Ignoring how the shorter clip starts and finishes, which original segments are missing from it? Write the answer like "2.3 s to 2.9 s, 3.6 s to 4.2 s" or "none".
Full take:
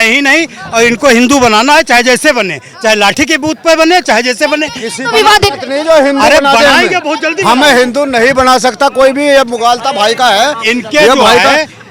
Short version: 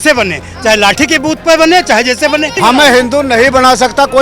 4.7 s to 7.4 s